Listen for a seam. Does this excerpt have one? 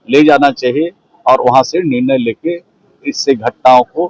no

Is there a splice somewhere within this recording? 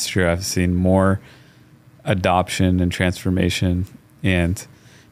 no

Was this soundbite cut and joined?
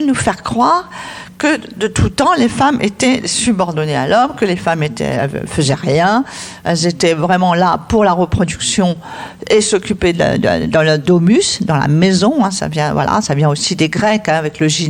no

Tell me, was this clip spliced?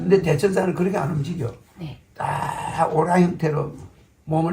no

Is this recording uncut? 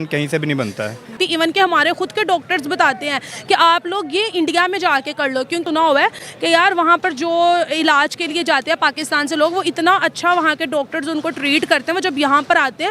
no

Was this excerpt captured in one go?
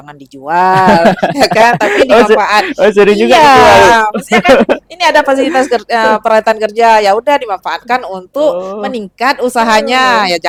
yes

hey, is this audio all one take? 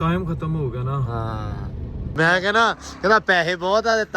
no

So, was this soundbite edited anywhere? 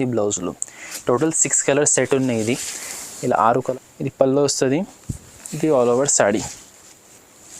yes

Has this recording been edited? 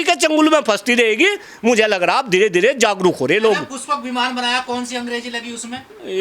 no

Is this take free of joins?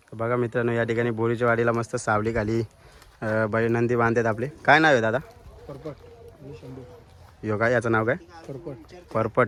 yes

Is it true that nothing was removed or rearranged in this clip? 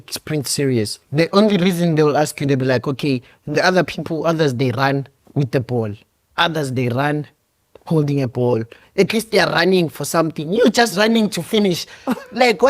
no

